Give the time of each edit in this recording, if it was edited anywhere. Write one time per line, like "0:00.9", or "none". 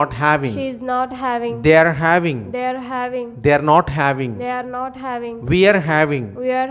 none